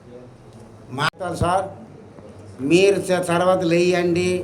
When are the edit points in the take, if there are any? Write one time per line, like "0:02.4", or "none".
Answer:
0:01.1

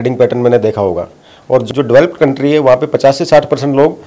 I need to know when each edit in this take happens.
0:01.7

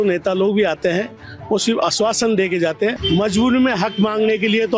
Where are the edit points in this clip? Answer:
0:03.0

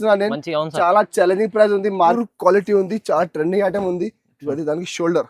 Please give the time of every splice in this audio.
0:02.2

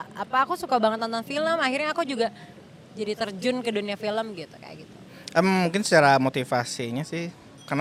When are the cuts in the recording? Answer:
none

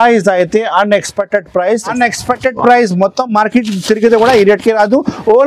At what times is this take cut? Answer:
0:01.9

